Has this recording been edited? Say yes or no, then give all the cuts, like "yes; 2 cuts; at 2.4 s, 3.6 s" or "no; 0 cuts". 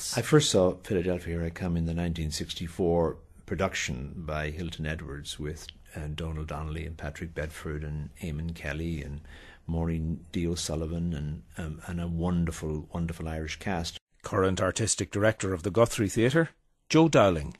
yes; 1 cut; at 7.3 s